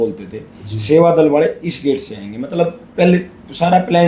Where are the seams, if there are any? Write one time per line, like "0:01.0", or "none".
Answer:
none